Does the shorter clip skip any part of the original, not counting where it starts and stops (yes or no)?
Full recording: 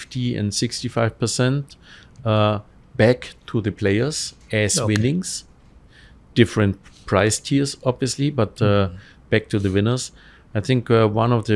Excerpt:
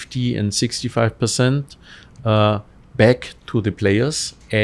no